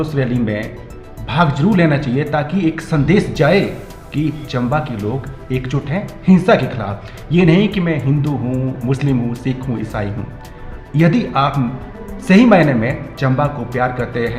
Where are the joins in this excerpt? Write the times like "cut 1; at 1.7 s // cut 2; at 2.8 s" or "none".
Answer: none